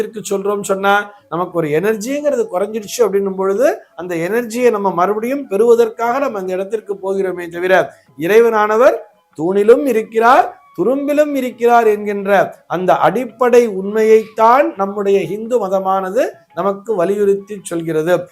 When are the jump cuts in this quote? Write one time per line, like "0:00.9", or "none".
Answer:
none